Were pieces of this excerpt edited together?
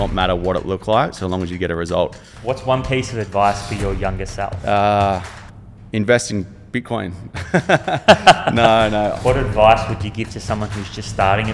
yes; 3 cuts; at 2.3 s, 4.6 s, 9.1 s

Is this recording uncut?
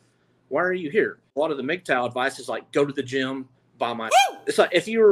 no; 2 cuts; at 1.3 s, 4.2 s

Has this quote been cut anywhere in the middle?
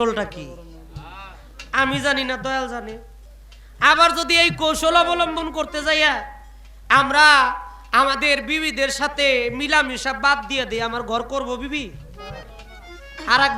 no; 0 cuts

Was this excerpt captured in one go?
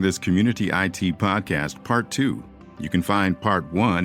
yes; 0 cuts

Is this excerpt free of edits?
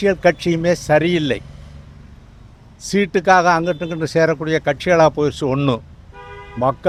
yes; 0 cuts

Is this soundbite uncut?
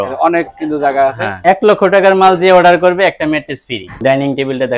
no; 2 cuts; at 1.4 s, 3.8 s

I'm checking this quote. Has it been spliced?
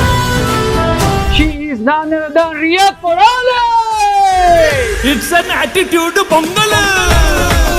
yes; 1 cut; at 1.3 s

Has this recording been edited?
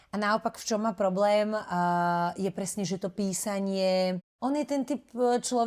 yes; 1 cut; at 4.3 s

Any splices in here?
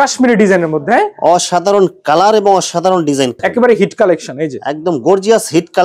yes; 1 cut; at 3.3 s

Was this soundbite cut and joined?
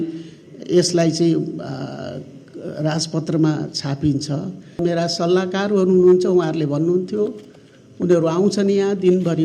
yes; 1 cut; at 4.8 s

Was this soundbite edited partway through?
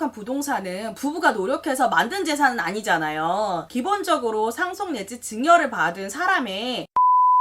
no; 0 cuts

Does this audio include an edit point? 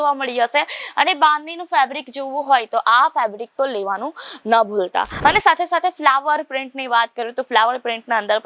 yes; 1 cut; at 5.2 s

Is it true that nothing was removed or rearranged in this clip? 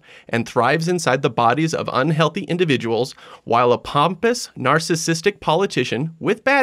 yes; 0 cuts

